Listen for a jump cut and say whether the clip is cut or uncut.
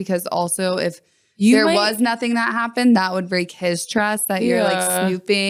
uncut